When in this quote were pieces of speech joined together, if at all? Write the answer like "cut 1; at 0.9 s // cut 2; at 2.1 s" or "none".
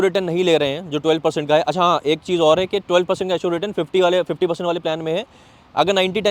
none